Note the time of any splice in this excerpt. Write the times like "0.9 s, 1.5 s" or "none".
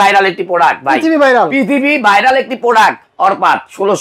3.1 s